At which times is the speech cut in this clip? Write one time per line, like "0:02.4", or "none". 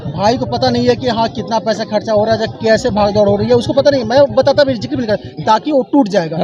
none